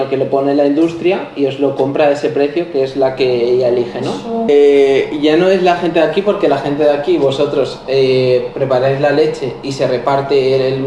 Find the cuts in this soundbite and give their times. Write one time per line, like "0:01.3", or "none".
0:04.5